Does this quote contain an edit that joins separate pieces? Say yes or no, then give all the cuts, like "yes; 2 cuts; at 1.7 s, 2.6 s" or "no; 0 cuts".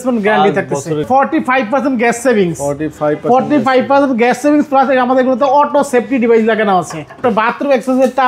yes; 2 cuts; at 1.0 s, 7.2 s